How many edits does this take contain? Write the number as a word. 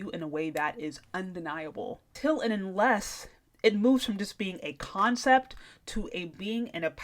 one